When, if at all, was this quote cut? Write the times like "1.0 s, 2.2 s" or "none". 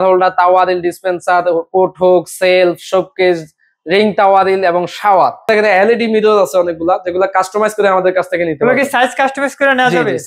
5.6 s